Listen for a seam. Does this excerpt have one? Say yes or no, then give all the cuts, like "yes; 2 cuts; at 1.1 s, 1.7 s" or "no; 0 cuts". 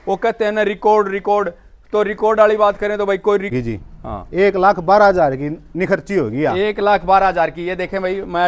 yes; 1 cut; at 3.5 s